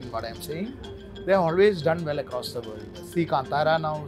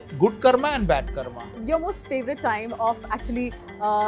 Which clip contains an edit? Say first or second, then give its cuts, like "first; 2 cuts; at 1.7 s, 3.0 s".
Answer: second; 1 cut; at 1.5 s